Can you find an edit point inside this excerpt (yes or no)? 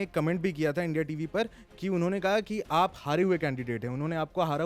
no